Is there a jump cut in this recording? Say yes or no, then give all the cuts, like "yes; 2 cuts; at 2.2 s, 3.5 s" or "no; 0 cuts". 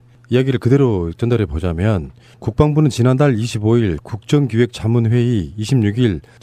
yes; 1 cut; at 1.2 s